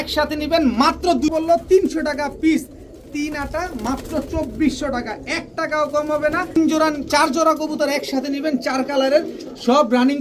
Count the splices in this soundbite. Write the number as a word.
two